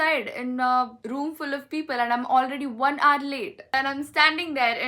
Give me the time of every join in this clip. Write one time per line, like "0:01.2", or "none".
0:03.7